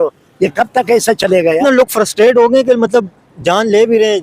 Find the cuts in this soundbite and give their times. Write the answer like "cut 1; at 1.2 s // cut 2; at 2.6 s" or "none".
cut 1; at 1.6 s